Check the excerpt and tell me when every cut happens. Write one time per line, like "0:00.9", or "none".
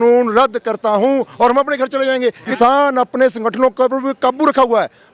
0:02.6